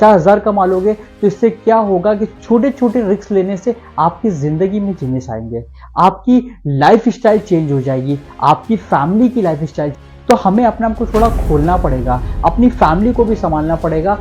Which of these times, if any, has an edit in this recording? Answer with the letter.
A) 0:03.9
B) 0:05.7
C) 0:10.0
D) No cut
C